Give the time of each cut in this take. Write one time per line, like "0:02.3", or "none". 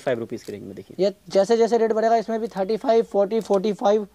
none